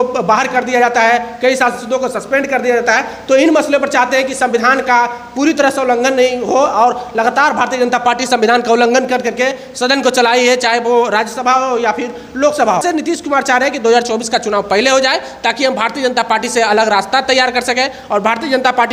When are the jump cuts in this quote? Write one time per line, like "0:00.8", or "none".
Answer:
0:12.8